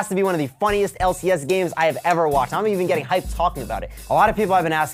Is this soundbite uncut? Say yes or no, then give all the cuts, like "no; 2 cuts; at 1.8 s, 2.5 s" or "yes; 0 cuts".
no; 1 cut; at 3.9 s